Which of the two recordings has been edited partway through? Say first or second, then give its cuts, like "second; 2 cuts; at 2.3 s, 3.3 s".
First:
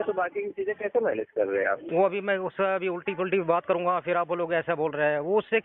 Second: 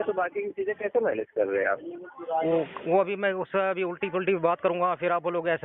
first; 1 cut; at 1.8 s